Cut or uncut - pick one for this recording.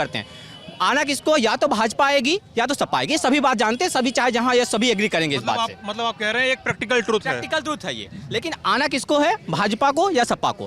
uncut